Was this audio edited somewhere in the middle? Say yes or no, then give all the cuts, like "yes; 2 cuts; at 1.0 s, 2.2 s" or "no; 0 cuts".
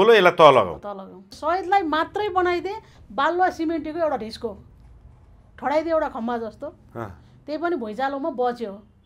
yes; 1 cut; at 1.3 s